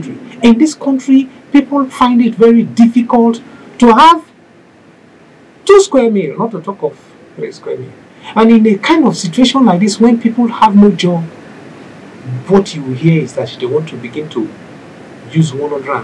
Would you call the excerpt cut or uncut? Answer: uncut